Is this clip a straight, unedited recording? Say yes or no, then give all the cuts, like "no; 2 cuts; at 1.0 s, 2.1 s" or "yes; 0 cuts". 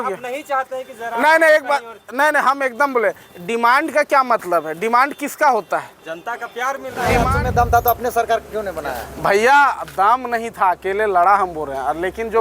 no; 1 cut; at 7.2 s